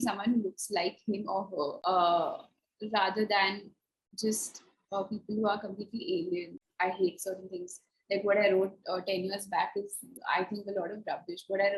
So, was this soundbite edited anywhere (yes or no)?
yes